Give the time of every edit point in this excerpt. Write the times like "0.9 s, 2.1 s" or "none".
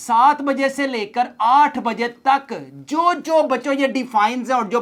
none